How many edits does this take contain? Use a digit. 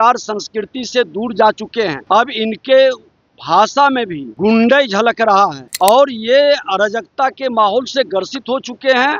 3